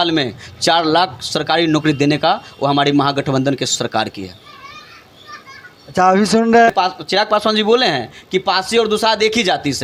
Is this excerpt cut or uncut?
uncut